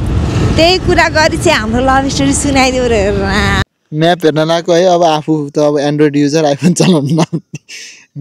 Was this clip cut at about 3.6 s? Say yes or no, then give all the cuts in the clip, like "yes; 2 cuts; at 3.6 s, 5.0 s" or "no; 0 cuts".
yes; 1 cut; at 3.6 s